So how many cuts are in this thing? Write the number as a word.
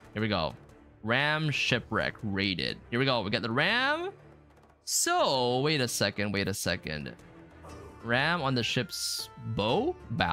zero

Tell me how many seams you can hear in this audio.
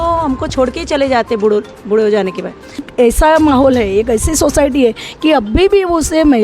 one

